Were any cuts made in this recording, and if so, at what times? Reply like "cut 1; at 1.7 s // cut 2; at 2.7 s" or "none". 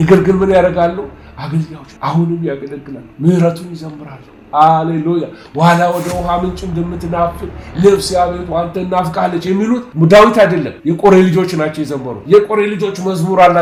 none